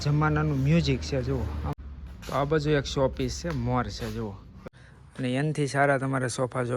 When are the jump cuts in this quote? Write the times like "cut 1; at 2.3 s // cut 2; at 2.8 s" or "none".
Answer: cut 1; at 1.7 s // cut 2; at 4.5 s

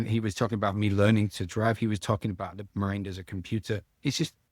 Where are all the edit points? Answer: none

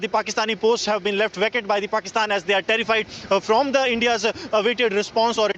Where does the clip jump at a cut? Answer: none

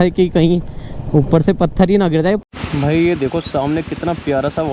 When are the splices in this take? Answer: cut 1; at 2.4 s

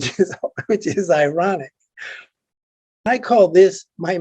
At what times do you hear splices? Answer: cut 1; at 3.1 s

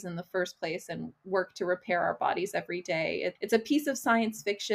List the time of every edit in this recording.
cut 1; at 3.4 s

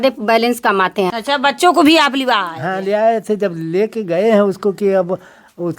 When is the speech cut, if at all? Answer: cut 1; at 1.2 s

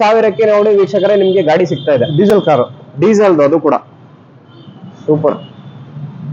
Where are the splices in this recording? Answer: none

